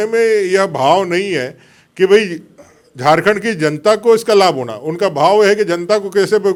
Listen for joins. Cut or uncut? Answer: uncut